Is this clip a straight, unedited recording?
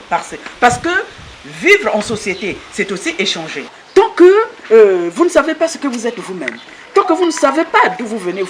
no; 1 cut; at 3.8 s

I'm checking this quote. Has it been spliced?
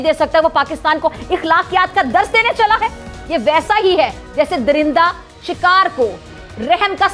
no; 0 cuts

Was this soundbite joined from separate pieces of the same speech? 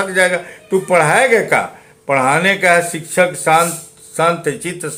no; 0 cuts

